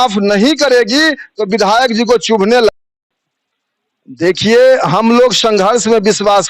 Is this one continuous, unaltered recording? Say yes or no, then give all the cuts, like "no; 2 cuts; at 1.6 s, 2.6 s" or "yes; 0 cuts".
no; 1 cut; at 2.8 s